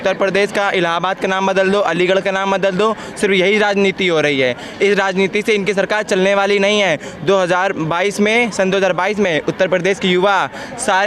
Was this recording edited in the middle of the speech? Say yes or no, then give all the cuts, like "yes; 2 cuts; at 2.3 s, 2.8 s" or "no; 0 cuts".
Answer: no; 0 cuts